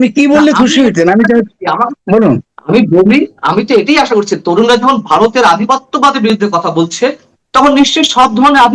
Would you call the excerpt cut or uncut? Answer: uncut